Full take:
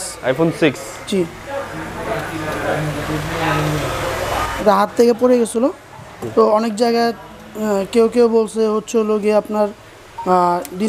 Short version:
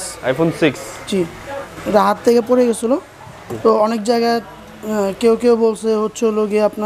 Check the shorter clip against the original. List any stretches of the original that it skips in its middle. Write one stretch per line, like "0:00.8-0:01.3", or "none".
0:01.8-0:04.5